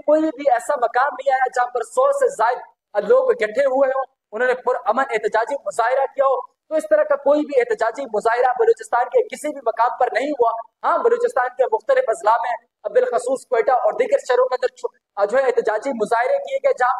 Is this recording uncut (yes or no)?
yes